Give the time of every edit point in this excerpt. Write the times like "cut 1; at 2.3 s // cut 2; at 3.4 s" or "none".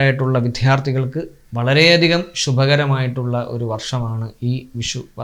none